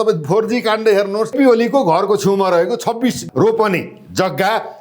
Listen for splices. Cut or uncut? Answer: cut